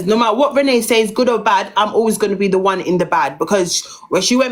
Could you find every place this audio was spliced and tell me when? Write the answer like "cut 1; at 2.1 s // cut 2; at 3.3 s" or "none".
none